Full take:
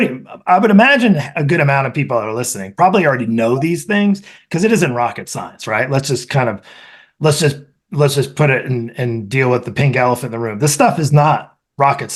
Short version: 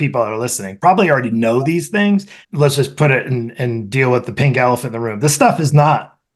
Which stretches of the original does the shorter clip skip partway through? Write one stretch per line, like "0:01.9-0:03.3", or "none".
0:04.3-0:07.8